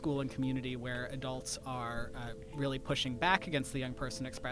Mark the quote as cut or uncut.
uncut